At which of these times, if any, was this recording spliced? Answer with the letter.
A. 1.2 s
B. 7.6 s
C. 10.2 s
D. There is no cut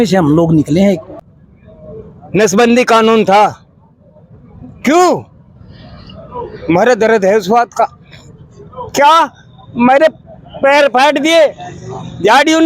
A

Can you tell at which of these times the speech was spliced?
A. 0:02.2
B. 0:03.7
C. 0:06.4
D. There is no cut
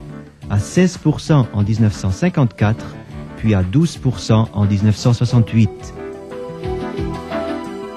A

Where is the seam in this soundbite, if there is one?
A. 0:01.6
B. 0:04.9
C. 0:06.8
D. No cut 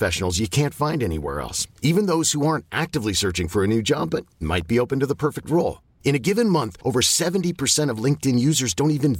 D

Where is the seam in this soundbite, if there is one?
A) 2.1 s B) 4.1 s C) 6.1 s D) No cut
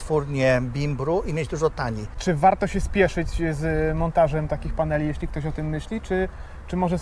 A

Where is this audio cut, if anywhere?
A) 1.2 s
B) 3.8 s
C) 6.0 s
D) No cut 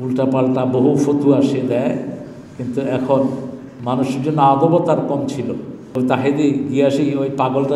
C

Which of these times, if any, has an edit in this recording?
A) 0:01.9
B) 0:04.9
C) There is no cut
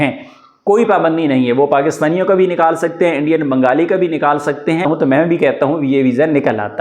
B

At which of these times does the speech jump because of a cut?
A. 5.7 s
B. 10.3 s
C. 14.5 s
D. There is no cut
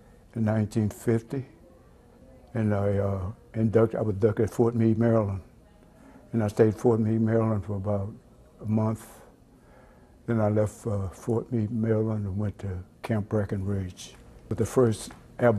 C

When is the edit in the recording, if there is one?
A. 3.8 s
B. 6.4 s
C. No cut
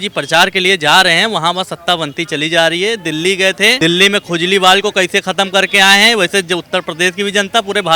A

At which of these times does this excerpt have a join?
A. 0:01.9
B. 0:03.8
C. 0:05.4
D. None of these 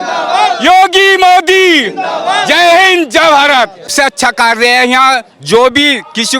B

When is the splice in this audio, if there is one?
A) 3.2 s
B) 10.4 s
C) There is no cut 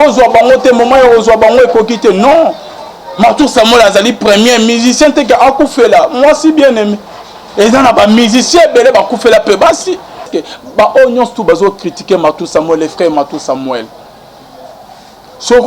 B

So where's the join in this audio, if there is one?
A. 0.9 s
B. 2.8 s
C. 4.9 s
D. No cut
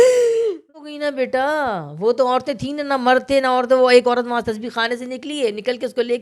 A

